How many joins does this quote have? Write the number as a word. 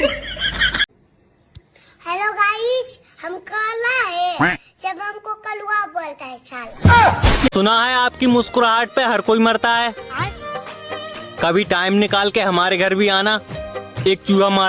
two